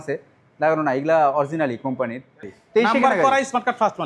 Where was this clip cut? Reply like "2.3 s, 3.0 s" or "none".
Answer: 2.5 s